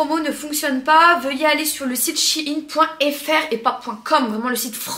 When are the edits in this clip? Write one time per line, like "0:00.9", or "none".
none